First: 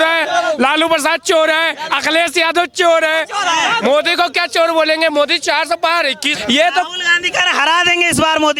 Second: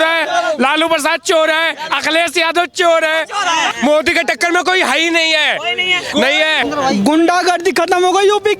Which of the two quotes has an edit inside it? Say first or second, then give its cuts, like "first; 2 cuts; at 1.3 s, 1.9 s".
second; 2 cuts; at 3.8 s, 6.6 s